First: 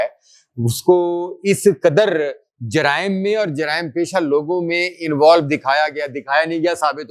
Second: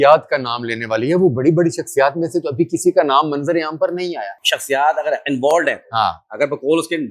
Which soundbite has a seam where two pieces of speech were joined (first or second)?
second